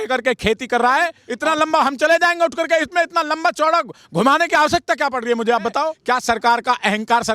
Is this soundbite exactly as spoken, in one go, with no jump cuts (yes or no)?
no